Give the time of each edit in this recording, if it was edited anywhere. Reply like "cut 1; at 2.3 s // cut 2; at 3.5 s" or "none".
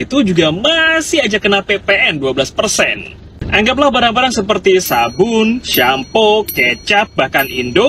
none